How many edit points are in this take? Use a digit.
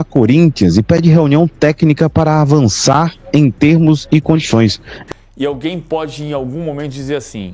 1